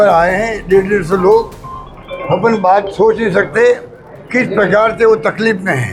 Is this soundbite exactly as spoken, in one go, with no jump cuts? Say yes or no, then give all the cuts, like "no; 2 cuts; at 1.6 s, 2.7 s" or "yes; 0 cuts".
yes; 0 cuts